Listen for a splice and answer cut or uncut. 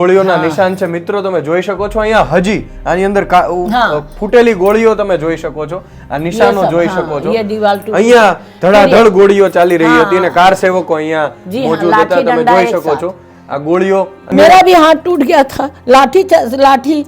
cut